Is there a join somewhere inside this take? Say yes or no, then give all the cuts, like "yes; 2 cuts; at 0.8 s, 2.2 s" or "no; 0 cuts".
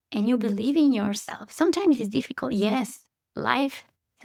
no; 0 cuts